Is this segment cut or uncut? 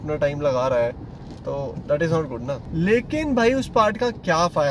cut